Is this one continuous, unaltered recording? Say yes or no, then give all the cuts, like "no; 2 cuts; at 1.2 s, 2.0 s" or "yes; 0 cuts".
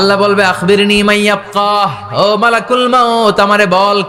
yes; 0 cuts